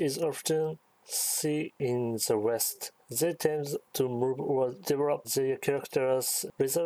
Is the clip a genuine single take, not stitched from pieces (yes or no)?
no